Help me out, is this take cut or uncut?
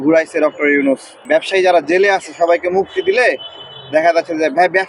cut